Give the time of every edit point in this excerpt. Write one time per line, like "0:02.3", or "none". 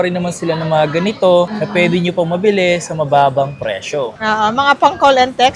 none